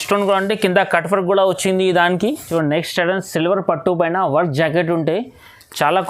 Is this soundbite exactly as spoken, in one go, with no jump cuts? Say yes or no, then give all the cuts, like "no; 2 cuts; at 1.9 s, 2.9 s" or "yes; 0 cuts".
no; 1 cut; at 2.4 s